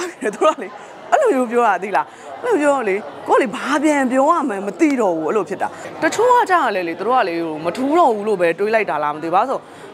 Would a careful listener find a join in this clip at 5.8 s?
yes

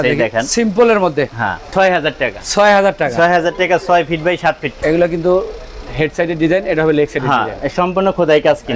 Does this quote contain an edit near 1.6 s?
yes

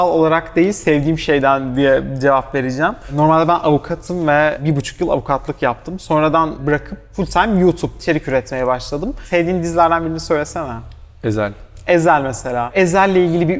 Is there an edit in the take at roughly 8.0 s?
yes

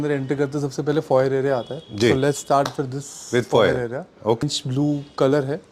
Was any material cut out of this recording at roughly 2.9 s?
no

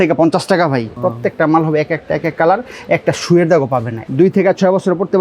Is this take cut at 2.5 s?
no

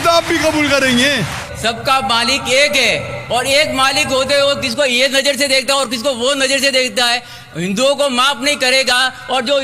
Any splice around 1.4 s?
yes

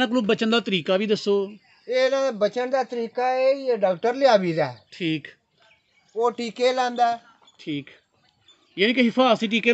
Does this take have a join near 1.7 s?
no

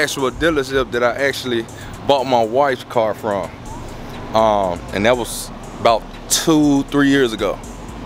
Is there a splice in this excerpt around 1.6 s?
no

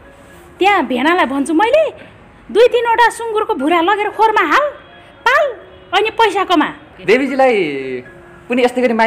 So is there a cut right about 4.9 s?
no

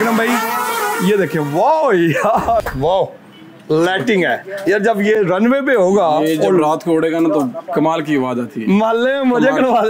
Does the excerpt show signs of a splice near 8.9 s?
no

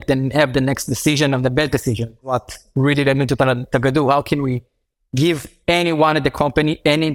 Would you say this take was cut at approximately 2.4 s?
yes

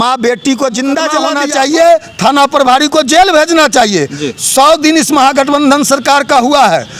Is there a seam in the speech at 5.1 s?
no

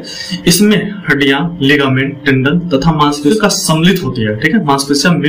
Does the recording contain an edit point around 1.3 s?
no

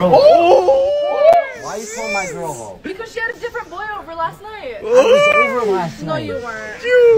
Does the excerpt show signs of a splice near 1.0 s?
yes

